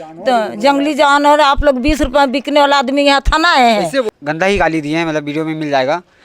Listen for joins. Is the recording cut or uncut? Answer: cut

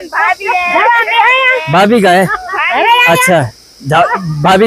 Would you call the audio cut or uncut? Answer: uncut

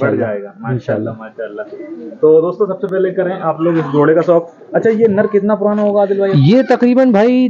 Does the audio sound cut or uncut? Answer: uncut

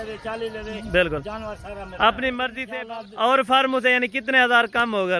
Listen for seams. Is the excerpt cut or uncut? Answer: cut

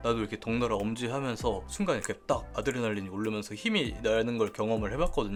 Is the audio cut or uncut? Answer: uncut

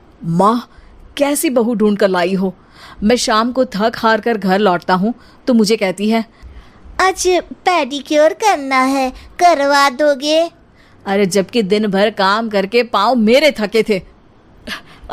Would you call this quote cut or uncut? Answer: uncut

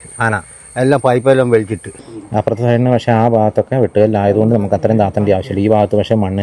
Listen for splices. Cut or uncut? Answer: cut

